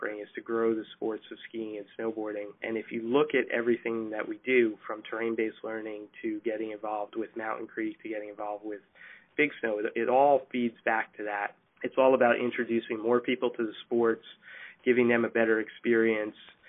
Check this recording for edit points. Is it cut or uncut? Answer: uncut